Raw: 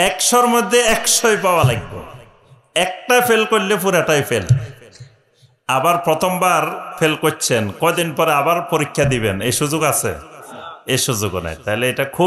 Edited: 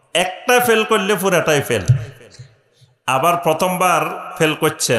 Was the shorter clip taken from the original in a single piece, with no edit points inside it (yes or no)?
yes